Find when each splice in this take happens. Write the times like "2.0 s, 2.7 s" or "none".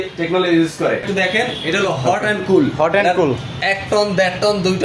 1.1 s